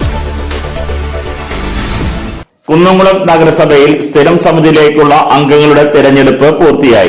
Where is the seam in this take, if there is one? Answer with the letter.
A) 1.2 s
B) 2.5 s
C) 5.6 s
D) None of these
B